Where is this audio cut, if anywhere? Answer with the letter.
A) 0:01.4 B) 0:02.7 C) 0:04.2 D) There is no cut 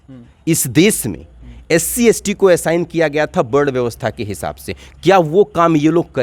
D